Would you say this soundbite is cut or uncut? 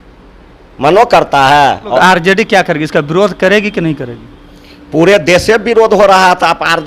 cut